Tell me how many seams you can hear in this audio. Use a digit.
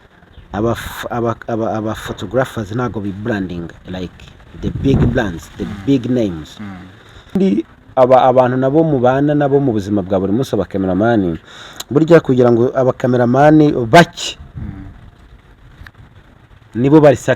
1